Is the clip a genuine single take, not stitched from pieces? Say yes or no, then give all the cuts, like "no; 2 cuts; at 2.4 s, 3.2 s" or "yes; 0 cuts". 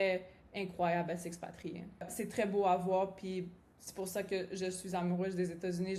no; 1 cut; at 2.2 s